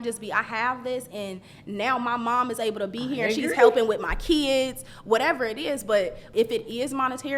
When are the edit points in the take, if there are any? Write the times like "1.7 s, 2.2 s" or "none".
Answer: 6.2 s